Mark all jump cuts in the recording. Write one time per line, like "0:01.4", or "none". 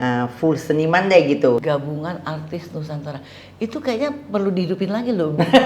0:01.6

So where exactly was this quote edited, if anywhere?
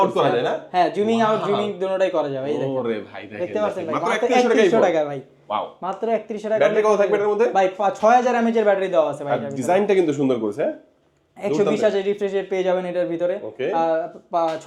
none

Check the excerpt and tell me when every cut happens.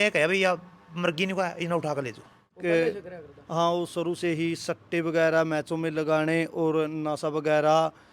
0:02.5

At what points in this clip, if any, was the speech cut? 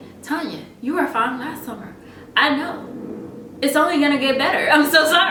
none

